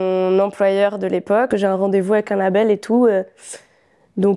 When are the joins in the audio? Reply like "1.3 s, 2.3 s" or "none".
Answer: 1.5 s